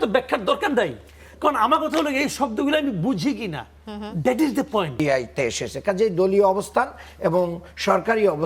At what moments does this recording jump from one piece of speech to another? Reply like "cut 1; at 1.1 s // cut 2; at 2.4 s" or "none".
cut 1; at 5.0 s